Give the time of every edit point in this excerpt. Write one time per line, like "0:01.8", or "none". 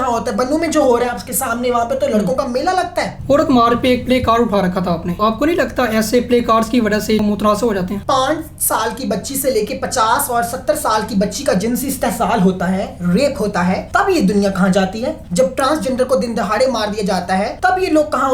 0:03.2
0:05.2
0:07.2
0:08.0
0:13.8
0:15.2
0:17.5